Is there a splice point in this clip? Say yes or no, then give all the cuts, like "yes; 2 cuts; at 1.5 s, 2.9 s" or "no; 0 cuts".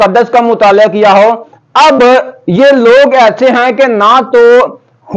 yes; 1 cut; at 1.5 s